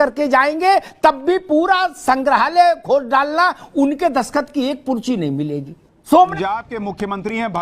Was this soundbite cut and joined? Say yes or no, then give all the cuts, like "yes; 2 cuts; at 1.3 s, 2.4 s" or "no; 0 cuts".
yes; 1 cut; at 6.3 s